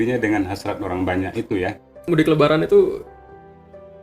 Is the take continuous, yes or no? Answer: no